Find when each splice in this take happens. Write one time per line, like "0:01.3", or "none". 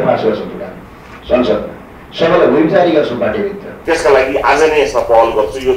0:03.7

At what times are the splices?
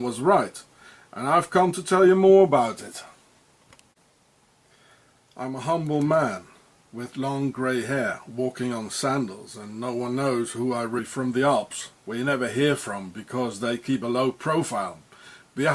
none

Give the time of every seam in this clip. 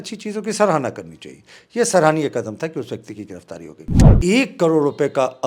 0:04.1

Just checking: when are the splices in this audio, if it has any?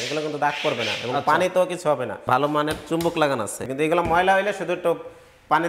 0:02.1
0:03.6

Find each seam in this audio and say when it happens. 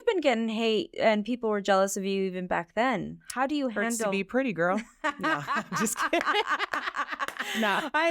0:00.9

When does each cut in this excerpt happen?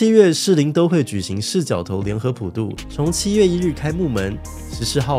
0:02.8

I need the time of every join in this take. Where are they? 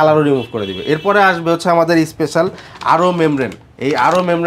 none

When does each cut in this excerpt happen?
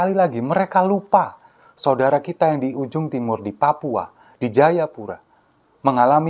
none

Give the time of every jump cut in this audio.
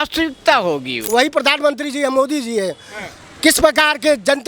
0:01.0

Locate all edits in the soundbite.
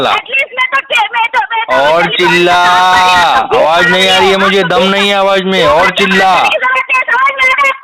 none

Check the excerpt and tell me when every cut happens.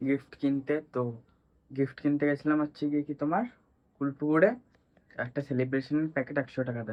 none

